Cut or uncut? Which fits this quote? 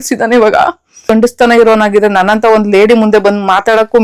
cut